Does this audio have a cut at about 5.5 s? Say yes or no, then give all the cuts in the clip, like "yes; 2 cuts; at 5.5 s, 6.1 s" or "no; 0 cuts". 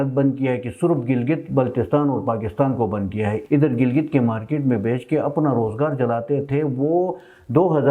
no; 1 cut; at 3.4 s